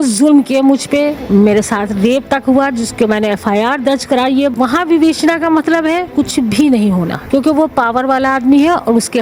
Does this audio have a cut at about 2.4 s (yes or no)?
no